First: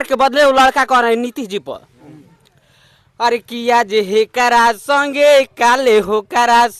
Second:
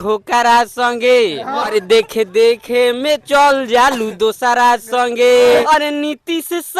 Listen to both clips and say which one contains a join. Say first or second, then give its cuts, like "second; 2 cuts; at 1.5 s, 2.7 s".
second; 2 cuts; at 1.7 s, 5.6 s